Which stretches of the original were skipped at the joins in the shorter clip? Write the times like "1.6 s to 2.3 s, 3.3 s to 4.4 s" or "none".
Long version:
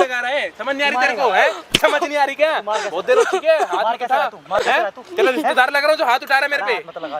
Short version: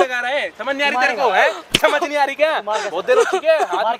none